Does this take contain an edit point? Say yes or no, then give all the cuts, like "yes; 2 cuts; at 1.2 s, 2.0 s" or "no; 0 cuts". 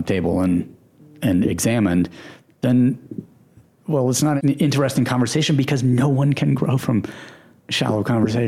yes; 1 cut; at 4.4 s